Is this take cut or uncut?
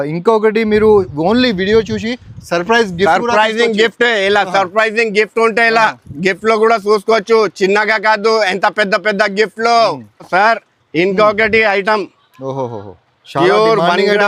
uncut